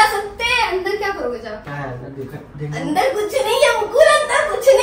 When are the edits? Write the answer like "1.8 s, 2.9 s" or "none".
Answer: 1.6 s

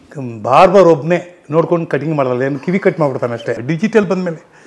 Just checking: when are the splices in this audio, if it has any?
3.6 s

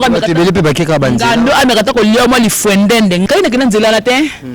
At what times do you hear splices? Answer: 3.2 s

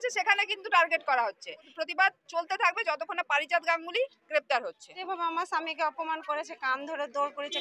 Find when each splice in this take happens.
1.7 s, 4.9 s

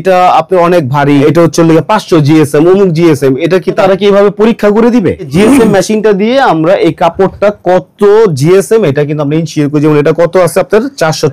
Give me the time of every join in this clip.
1.2 s, 3.8 s, 5.3 s

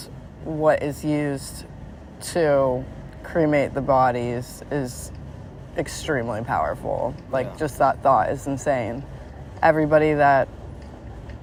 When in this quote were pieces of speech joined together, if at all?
none

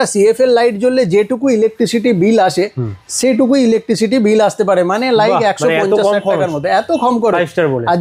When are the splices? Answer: none

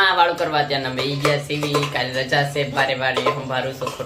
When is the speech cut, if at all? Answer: none

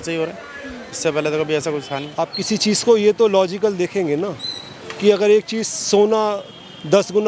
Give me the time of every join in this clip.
2.1 s

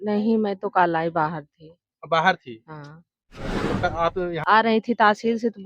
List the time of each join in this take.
4.4 s

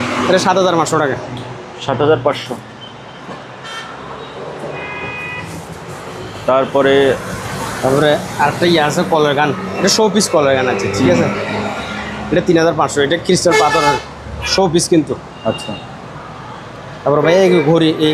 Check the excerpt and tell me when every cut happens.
none

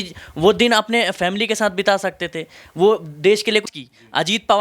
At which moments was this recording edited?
3.7 s

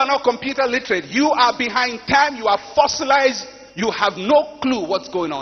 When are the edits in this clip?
none

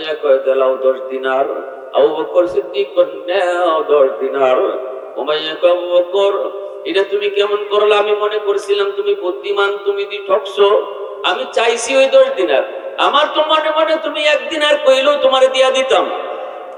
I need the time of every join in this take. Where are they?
none

